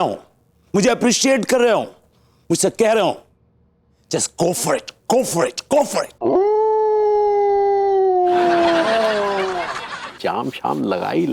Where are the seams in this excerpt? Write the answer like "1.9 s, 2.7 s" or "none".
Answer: 6.1 s, 10.2 s